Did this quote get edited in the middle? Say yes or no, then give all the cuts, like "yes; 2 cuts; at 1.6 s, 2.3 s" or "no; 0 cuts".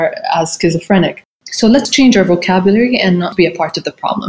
yes; 2 cuts; at 1.9 s, 3.3 s